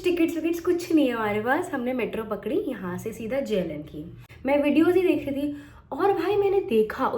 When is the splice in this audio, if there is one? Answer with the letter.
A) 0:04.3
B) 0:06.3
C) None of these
A